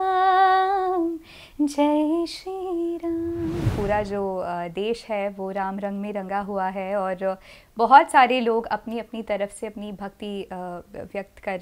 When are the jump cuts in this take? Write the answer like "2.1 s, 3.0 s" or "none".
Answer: 3.7 s